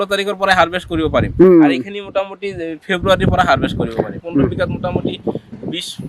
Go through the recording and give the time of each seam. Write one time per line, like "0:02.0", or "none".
0:04.2